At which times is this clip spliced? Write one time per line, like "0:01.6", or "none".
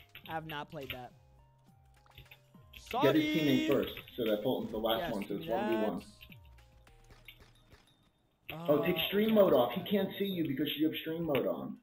none